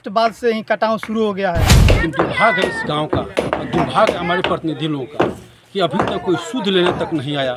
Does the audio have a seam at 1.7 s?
yes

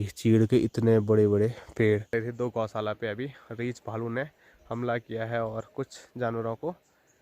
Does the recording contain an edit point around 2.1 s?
yes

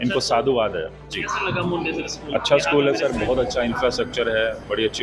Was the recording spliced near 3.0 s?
no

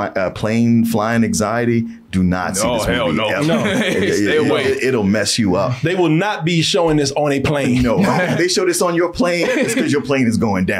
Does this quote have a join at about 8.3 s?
yes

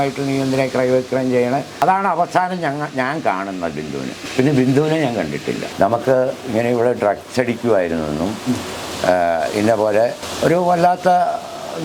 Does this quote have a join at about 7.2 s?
no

